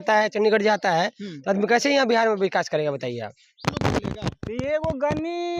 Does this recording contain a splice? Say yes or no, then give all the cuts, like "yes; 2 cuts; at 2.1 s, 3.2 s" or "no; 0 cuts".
yes; 1 cut; at 3.4 s